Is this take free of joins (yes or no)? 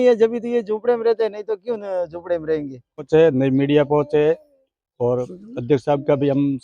no